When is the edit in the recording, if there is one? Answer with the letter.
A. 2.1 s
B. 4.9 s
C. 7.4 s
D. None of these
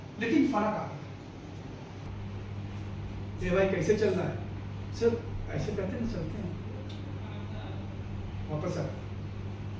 A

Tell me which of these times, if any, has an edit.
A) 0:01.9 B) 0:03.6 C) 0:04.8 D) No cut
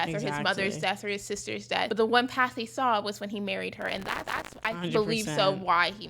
A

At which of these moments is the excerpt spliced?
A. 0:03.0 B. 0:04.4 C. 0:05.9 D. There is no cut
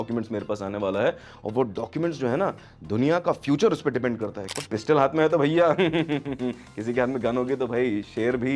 B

